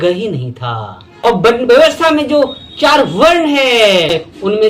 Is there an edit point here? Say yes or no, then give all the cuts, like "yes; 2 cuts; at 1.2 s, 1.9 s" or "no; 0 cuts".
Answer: yes; 1 cut; at 1.3 s